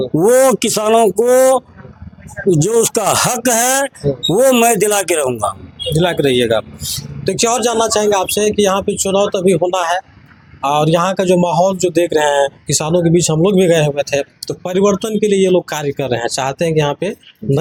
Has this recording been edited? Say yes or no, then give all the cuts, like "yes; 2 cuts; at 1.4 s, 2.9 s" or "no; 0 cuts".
no; 0 cuts